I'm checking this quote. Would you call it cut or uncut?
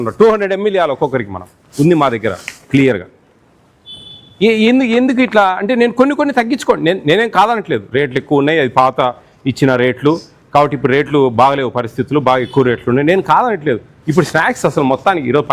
uncut